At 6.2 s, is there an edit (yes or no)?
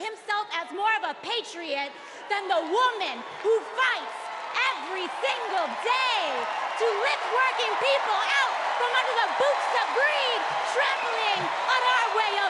no